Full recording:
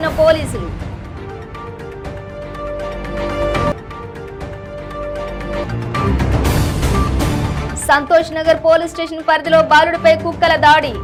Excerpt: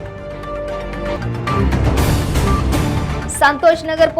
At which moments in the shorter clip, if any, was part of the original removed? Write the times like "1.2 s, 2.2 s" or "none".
1.2 s